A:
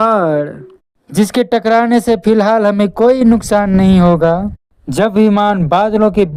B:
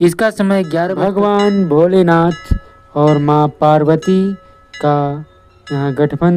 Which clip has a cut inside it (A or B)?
B